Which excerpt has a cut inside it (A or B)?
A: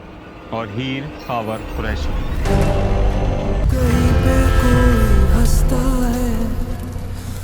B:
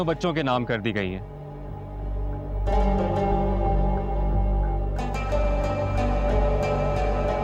A